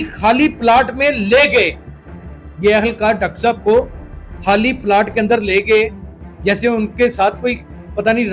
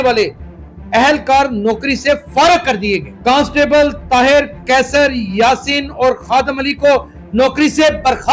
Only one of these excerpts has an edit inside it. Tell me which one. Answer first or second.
second